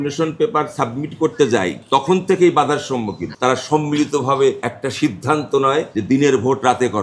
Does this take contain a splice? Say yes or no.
no